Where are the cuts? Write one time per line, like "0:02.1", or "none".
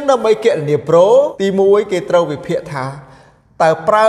0:01.3